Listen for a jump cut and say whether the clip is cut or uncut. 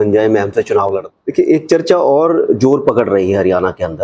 cut